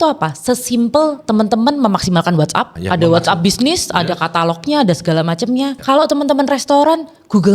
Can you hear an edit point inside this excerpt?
yes; 2 cuts; at 2.8 s, 5.8 s

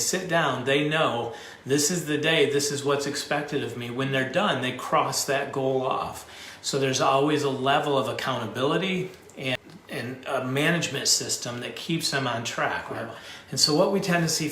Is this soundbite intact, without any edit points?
no; 2 cuts; at 9.5 s, 13.0 s

